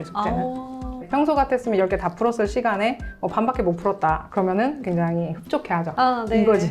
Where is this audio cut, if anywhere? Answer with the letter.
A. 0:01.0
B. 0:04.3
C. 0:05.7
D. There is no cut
A